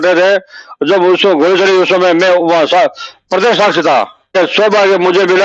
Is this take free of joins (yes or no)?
no